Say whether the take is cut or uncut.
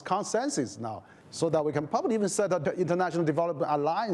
cut